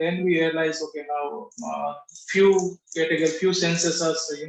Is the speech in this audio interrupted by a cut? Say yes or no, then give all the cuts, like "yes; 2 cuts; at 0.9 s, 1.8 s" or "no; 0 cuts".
no; 0 cuts